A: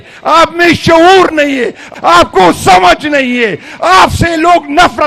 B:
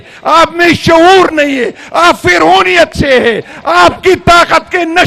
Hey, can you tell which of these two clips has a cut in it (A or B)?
A